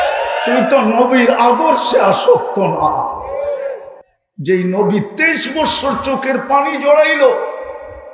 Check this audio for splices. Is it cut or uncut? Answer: uncut